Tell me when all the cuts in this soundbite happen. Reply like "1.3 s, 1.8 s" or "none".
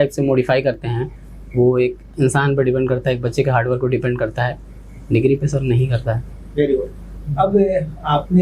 none